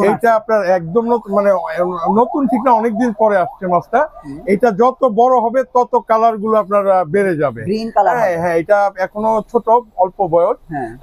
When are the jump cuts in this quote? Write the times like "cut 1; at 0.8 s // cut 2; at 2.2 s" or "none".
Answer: none